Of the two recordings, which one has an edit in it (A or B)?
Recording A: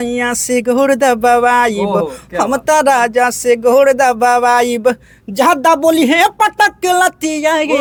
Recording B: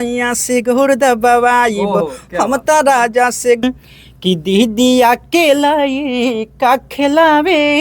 B